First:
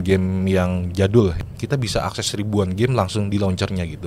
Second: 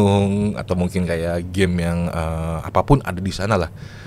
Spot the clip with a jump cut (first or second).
first